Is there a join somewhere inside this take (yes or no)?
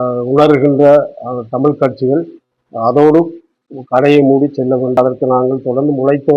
yes